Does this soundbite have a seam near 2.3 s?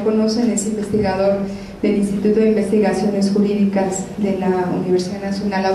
no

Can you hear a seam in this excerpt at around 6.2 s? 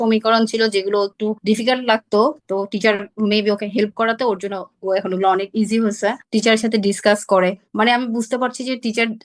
yes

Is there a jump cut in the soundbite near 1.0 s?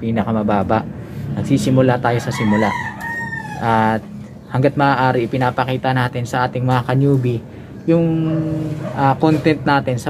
no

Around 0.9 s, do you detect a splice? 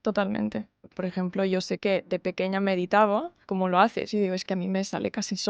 yes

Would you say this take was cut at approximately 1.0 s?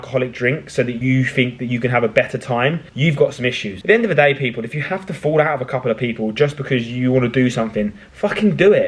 yes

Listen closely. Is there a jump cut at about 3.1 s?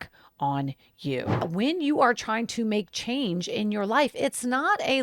no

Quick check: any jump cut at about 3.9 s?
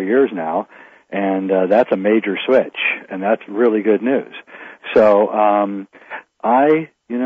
yes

